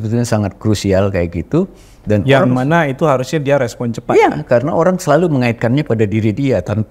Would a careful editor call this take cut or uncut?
uncut